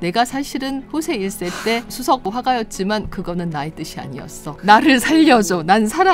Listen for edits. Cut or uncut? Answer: cut